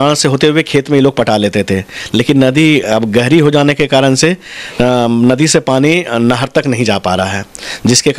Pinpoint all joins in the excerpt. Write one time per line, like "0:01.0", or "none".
none